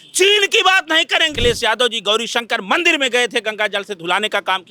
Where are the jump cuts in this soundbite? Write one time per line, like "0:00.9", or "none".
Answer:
0:01.3